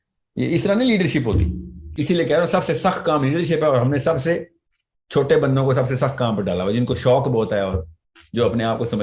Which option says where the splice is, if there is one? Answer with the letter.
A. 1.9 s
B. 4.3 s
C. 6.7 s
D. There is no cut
A